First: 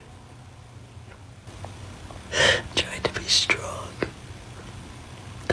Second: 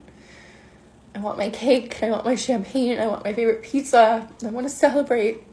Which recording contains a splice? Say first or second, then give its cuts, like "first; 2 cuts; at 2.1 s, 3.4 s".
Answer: first; 1 cut; at 1.5 s